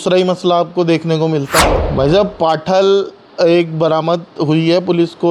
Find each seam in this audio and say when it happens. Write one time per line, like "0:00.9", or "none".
0:01.8